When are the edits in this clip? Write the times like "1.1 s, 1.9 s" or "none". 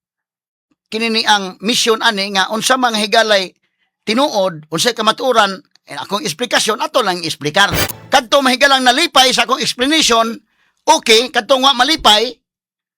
7.9 s